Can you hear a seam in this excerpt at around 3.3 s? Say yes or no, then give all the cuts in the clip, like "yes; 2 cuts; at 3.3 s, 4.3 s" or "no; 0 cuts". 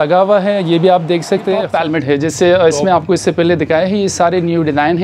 no; 1 cut; at 1.7 s